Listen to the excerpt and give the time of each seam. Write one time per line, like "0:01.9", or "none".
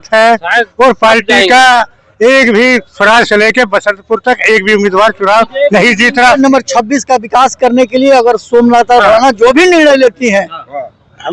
0:06.4